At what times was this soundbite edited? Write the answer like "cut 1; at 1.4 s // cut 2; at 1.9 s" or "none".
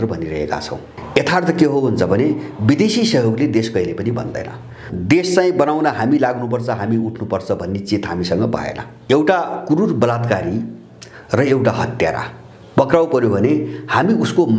cut 1; at 0.9 s // cut 2; at 4.8 s // cut 3; at 8.9 s